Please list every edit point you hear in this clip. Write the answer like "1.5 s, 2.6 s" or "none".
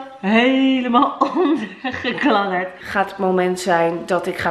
2.8 s